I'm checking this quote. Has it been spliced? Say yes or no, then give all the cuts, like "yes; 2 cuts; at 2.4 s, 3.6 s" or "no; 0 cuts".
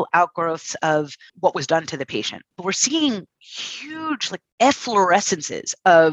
yes; 2 cuts; at 1.3 s, 2.5 s